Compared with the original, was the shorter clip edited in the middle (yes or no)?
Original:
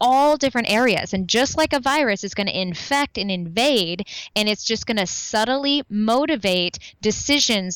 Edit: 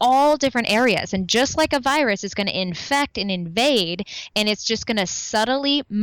no